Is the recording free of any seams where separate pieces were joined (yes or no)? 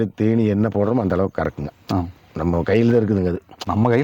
yes